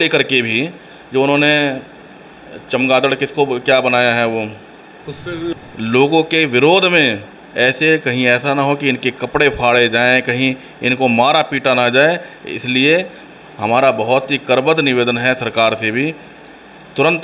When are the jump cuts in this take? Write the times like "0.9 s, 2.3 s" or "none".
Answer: 5.5 s